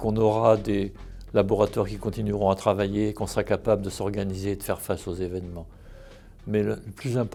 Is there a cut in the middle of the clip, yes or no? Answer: no